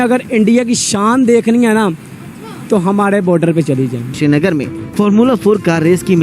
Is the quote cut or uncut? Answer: cut